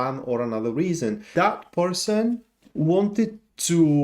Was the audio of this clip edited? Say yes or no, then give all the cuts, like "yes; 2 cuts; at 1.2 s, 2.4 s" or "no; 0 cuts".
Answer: yes; 2 cuts; at 1.2 s, 2.6 s